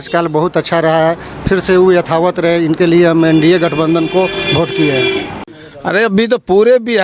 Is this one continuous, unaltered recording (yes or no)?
no